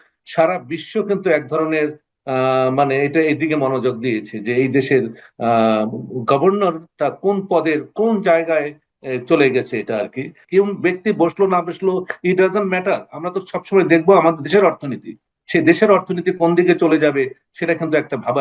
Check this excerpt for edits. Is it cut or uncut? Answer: cut